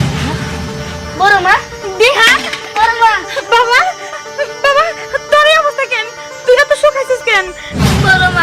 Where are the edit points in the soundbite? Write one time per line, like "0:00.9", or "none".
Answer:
none